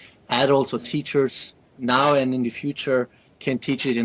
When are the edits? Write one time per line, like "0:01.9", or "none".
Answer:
0:01.4